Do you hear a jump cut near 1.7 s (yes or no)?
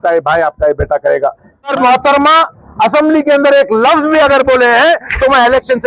yes